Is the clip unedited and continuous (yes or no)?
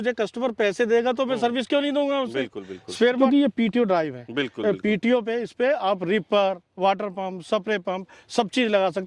no